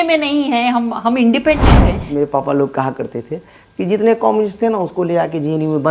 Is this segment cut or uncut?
cut